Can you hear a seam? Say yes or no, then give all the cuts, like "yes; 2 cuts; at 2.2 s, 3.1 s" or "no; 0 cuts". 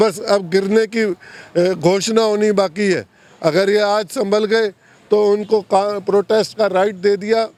no; 0 cuts